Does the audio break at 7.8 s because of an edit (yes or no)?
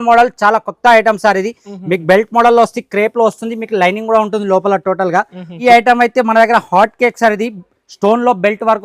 no